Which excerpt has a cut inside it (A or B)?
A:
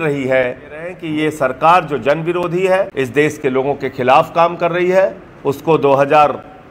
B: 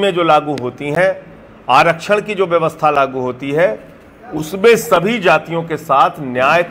A